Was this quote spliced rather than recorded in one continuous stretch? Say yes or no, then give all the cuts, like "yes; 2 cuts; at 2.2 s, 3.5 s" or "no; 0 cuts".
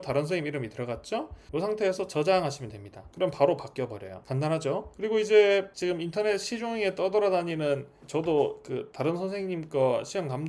no; 0 cuts